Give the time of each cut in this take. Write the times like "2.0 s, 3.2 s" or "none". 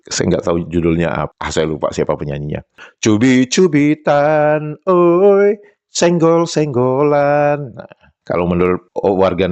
1.4 s, 2.8 s